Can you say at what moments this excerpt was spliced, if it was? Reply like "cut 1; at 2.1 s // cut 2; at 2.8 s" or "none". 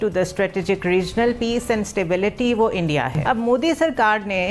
cut 1; at 3.2 s